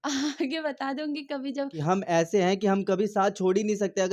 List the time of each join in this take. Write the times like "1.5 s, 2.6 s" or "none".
1.8 s